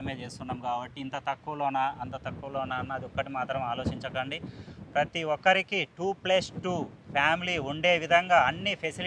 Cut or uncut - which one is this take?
uncut